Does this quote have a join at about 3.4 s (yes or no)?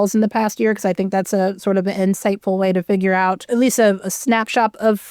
yes